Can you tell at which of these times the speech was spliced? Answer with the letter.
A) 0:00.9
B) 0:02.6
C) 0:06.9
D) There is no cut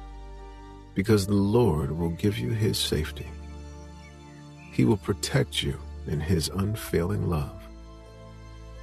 A